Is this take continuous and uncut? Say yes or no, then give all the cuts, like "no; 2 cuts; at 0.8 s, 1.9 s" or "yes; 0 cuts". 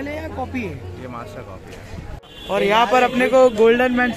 no; 1 cut; at 2.2 s